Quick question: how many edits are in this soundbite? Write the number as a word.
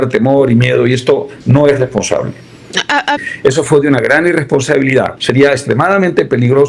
two